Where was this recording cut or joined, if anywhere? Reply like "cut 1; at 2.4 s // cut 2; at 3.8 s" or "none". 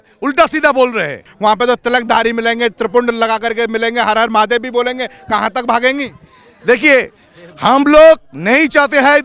cut 1; at 1.3 s